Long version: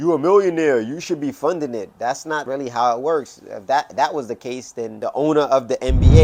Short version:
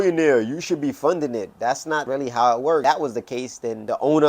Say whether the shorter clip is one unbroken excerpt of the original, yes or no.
no